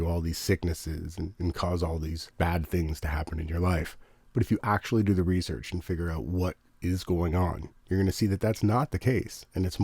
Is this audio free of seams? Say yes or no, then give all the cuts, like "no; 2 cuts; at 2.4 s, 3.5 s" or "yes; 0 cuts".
no; 1 cut; at 2.2 s